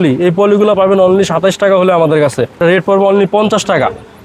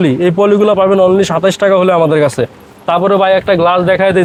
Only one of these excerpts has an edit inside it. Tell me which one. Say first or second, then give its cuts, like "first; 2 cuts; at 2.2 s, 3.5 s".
first; 1 cut; at 2.5 s